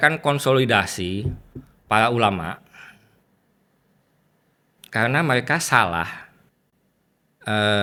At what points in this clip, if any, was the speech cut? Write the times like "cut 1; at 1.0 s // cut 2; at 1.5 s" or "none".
none